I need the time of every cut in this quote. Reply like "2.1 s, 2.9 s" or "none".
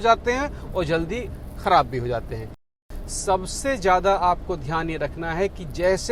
2.8 s